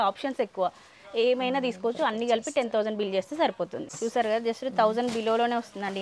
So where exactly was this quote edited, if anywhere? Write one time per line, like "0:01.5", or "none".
0:03.8

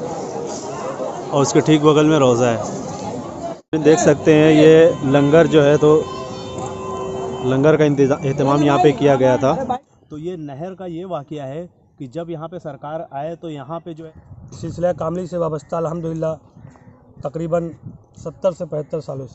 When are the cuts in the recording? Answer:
0:03.5
0:09.8
0:14.0

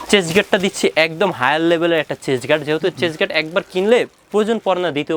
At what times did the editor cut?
none

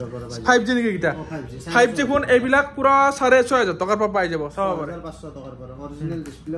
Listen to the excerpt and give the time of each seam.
none

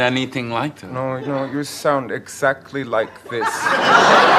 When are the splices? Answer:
none

